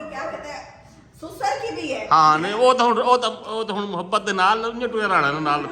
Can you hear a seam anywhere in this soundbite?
no; 0 cuts

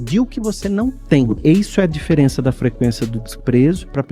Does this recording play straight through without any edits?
no; 1 cut; at 1.3 s

